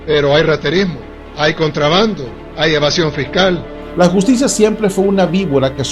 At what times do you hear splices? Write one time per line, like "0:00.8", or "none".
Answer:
0:03.7